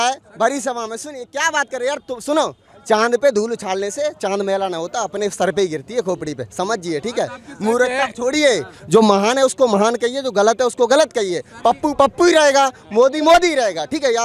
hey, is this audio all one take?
yes; 0 cuts

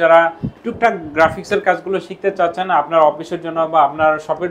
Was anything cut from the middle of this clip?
no; 0 cuts

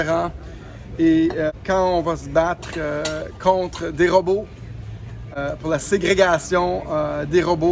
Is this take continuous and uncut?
no; 2 cuts; at 1.5 s, 5.3 s

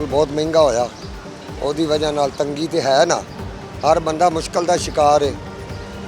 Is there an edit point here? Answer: no; 0 cuts

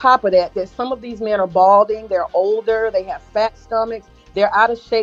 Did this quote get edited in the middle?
no; 0 cuts

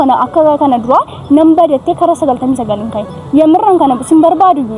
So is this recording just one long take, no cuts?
yes; 0 cuts

